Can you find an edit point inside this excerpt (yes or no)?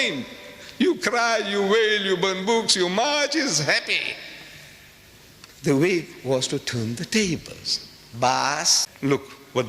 yes